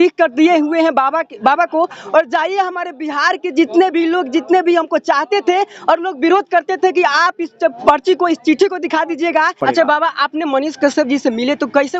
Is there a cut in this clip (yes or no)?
yes